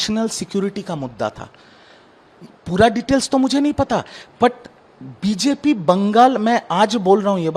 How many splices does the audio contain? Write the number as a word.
zero